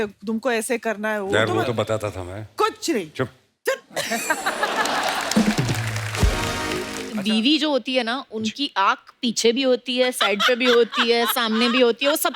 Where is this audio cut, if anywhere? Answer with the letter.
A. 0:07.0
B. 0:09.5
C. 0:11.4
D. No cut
A